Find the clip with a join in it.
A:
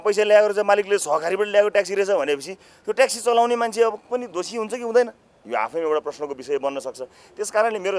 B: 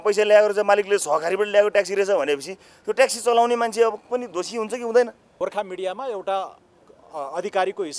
B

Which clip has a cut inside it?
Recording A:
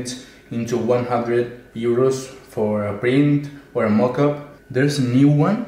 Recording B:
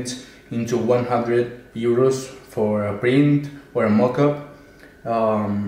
A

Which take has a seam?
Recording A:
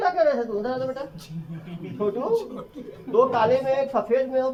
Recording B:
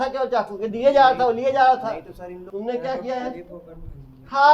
B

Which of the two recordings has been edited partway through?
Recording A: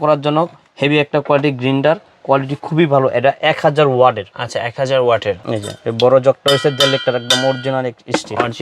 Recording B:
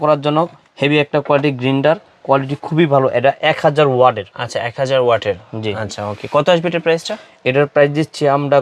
A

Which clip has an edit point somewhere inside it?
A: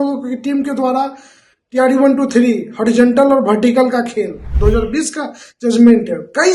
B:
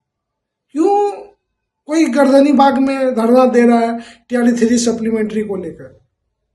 A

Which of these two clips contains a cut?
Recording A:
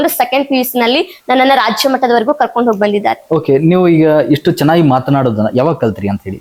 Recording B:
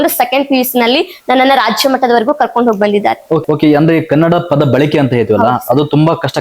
B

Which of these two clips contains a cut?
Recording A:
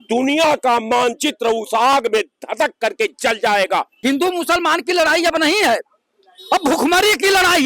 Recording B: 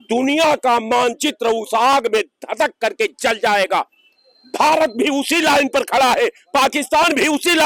A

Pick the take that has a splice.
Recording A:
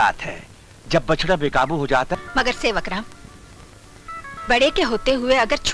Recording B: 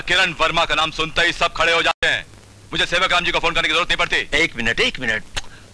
A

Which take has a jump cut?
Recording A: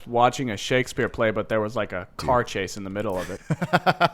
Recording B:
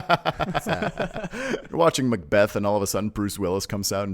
B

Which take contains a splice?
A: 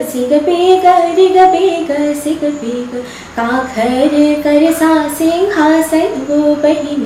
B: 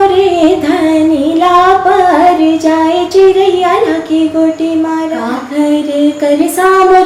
B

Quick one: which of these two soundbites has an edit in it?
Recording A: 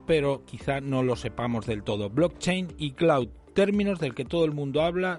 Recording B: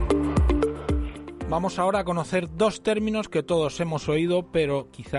A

